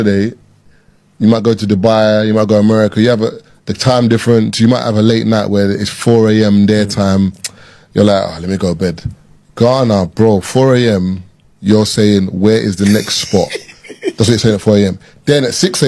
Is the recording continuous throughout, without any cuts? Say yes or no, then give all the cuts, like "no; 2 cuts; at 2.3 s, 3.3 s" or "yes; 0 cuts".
yes; 0 cuts